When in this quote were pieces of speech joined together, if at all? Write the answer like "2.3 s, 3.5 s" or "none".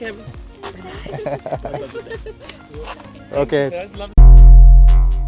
4.0 s